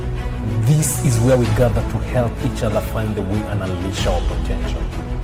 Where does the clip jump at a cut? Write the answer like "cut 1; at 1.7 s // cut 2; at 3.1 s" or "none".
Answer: none